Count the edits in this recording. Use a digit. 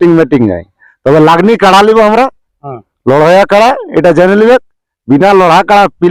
0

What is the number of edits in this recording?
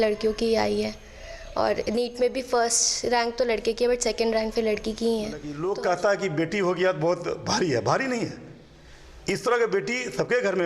1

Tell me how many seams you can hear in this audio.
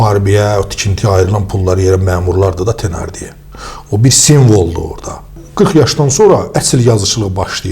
1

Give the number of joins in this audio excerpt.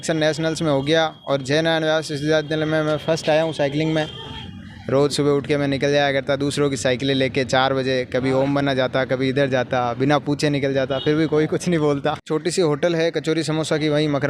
2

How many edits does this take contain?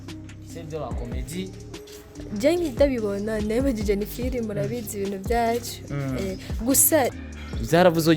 1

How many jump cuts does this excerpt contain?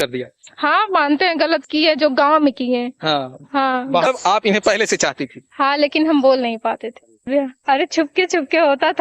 2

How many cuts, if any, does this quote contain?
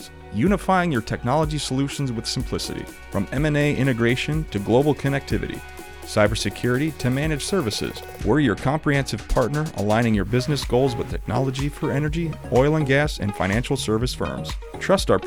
0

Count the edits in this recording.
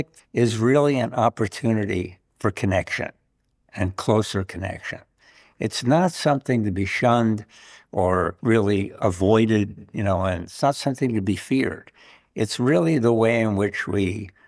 1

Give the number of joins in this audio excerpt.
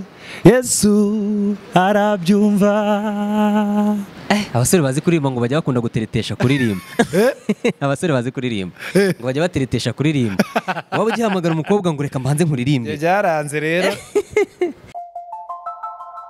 1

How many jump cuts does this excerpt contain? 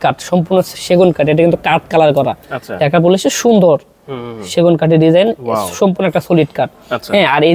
0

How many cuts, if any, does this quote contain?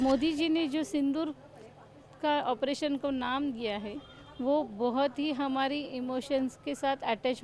0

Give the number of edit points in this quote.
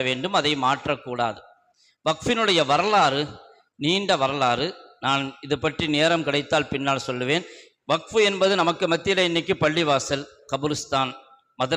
0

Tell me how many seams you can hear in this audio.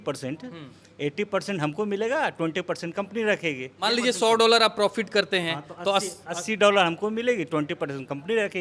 1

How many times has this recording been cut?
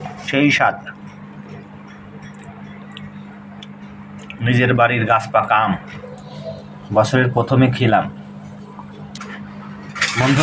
1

